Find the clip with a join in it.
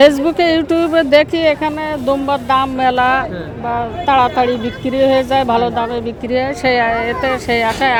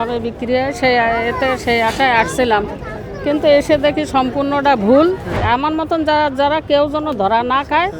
second; 1 cut; at 5.4 s

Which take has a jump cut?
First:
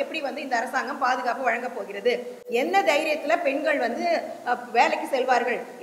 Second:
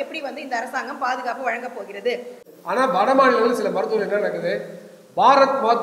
second; 1 cut; at 2.4 s

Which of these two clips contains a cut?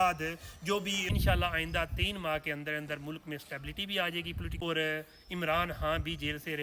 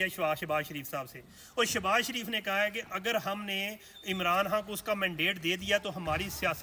first; 2 cuts; at 1.1 s, 4.5 s

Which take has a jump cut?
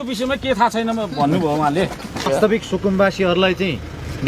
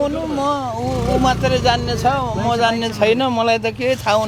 first; 1 cut; at 2.3 s

